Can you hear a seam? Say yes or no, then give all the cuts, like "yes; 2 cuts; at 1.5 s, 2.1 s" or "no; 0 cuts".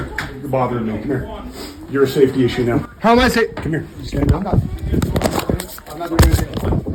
no; 0 cuts